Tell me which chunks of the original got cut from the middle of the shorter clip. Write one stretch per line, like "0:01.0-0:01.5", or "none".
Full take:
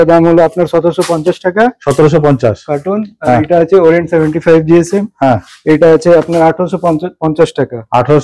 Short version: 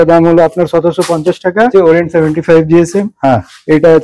0:01.7-0:03.7